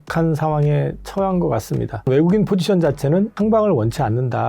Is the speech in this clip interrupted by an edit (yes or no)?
yes